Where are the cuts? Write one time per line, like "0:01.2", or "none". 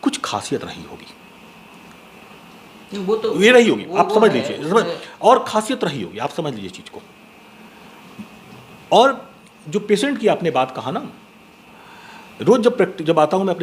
none